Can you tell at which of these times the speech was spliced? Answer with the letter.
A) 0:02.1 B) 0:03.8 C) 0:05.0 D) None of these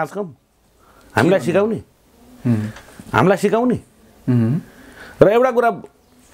D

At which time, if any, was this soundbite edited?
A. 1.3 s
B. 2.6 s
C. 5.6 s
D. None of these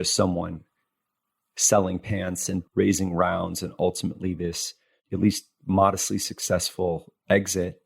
B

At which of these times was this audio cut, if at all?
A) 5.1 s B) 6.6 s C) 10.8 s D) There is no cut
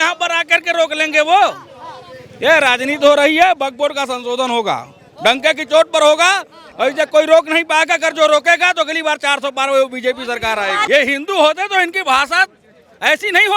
C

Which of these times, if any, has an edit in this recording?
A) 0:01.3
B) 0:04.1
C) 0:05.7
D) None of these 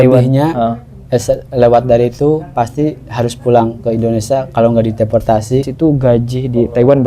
C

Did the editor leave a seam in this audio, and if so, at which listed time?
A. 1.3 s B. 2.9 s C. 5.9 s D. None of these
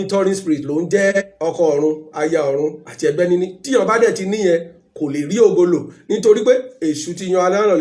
A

